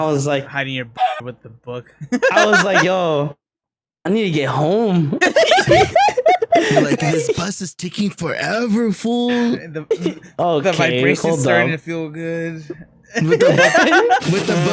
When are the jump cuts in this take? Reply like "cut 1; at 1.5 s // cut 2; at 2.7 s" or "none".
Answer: none